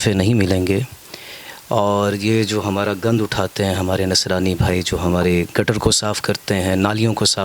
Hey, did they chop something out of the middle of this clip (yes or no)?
no